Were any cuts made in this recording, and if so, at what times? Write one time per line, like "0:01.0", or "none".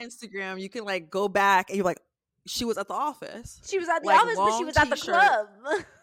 none